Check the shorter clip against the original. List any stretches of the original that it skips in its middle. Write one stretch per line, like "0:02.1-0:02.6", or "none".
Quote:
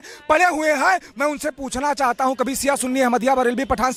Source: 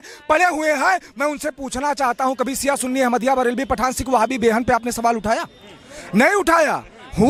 none